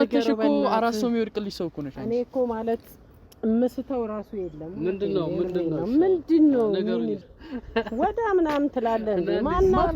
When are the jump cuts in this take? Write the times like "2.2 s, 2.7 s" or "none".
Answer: 7.2 s